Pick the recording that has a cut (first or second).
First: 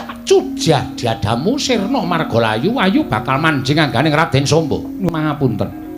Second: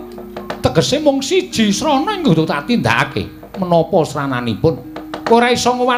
first